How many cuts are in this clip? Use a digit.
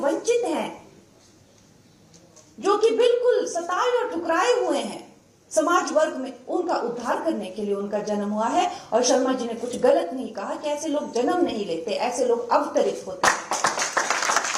0